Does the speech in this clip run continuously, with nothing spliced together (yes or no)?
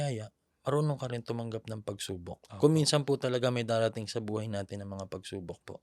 yes